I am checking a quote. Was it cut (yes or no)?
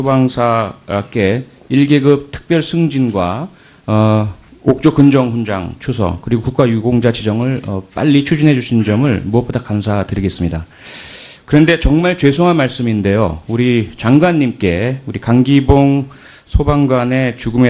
yes